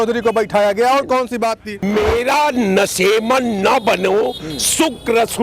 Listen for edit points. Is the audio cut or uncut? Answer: cut